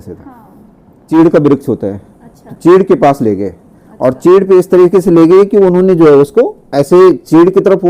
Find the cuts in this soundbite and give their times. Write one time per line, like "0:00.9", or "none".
0:01.1